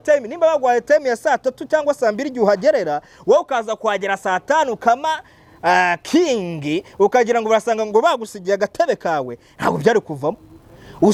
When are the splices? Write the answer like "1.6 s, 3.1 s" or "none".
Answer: none